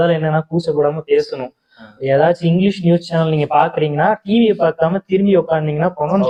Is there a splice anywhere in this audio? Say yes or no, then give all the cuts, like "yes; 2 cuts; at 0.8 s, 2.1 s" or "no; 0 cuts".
no; 0 cuts